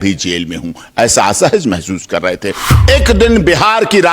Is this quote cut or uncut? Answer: cut